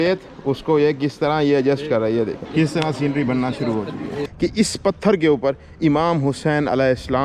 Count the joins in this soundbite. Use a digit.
2